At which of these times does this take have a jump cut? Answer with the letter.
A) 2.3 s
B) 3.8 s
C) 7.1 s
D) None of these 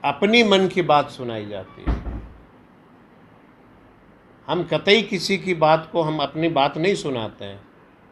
D